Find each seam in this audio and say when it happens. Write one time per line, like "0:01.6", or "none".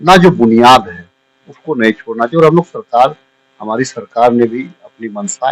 none